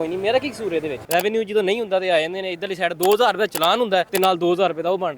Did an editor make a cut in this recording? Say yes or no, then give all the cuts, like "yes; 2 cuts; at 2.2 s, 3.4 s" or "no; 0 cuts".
yes; 2 cuts; at 1.0 s, 4.0 s